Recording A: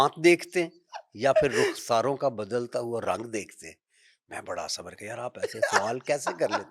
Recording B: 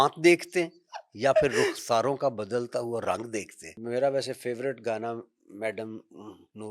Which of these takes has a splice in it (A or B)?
B